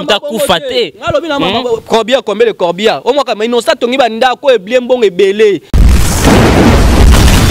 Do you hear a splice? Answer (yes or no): yes